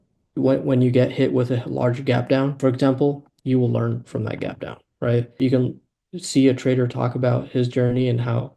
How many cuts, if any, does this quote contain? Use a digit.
2